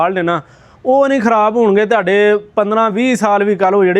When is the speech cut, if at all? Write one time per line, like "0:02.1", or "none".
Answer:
none